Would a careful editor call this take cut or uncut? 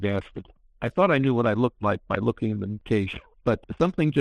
cut